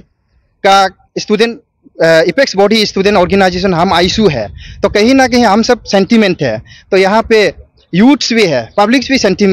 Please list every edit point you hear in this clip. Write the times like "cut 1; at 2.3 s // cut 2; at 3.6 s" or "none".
none